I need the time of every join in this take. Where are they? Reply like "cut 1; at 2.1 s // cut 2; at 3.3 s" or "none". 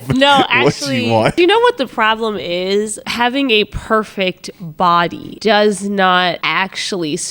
cut 1; at 1.4 s // cut 2; at 3.0 s // cut 3; at 5.3 s // cut 4; at 6.4 s